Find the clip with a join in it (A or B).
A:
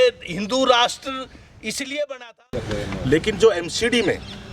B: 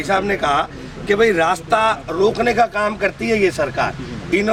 A